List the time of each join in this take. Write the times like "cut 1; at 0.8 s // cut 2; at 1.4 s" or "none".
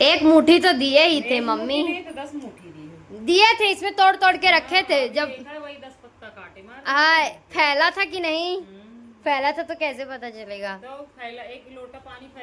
none